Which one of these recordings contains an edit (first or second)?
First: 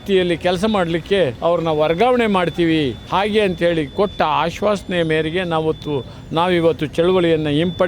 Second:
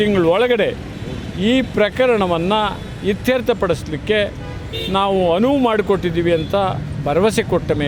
first